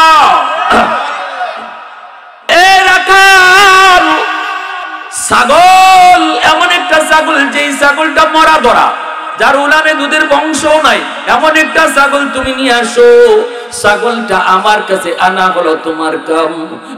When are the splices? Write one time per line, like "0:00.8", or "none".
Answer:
0:02.5